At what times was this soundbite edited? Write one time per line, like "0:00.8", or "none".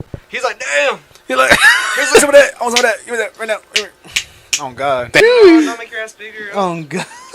0:02.2
0:05.2